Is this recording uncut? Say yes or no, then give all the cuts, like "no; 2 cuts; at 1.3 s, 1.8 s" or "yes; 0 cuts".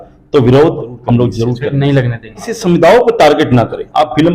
no; 2 cuts; at 1.5 s, 2.5 s